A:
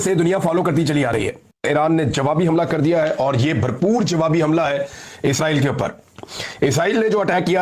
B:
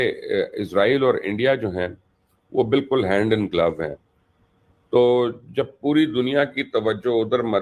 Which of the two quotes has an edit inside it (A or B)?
A